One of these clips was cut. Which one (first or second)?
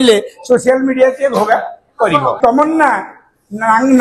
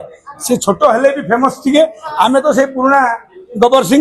first